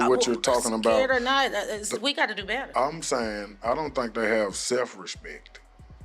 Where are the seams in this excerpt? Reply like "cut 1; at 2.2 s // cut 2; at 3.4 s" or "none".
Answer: cut 1; at 2.6 s